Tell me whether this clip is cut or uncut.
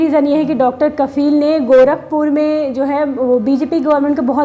uncut